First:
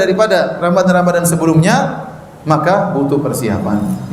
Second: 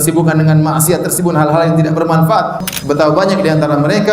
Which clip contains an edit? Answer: second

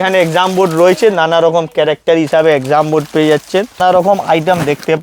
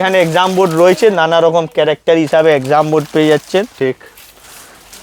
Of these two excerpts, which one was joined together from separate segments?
first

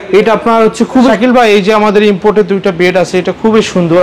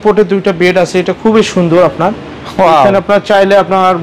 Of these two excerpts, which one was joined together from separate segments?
first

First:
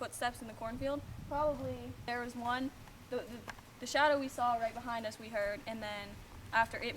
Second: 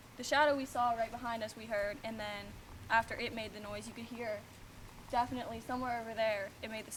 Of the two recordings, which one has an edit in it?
first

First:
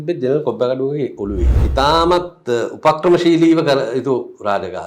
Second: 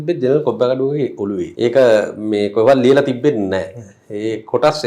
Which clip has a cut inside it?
first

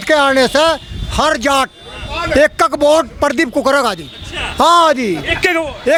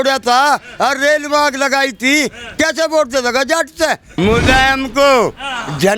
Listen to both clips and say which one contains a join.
second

